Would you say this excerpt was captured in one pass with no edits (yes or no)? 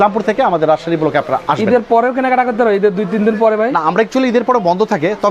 yes